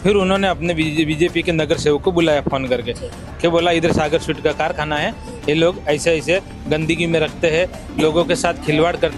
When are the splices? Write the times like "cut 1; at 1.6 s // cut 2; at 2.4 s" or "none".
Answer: none